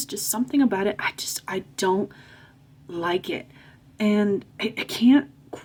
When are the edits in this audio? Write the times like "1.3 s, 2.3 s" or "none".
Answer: none